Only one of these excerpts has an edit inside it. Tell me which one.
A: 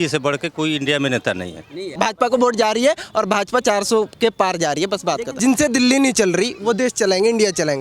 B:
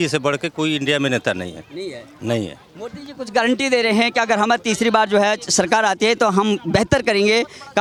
A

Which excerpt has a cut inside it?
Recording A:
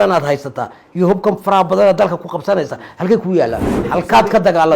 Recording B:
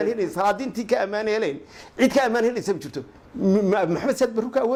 A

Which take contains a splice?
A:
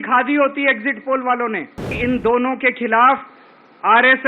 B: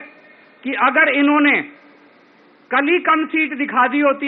A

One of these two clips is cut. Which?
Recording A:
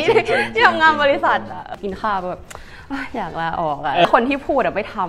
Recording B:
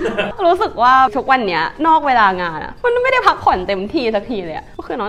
A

